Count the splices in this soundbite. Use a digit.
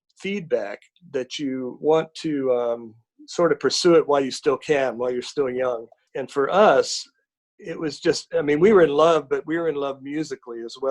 1